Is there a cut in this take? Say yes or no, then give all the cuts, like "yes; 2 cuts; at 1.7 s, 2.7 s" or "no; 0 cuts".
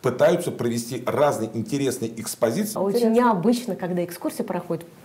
yes; 1 cut; at 2.7 s